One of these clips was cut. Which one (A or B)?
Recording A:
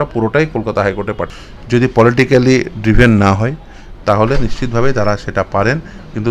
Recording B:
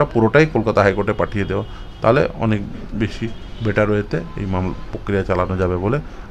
A